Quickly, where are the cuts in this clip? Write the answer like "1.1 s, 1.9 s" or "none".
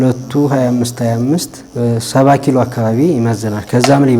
1.6 s